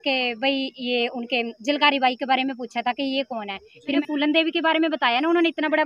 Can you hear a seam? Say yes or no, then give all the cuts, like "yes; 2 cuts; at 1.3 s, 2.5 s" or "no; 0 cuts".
yes; 1 cut; at 4.0 s